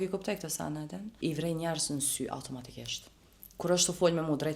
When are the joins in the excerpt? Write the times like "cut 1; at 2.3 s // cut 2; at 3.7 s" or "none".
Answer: cut 1; at 1.0 s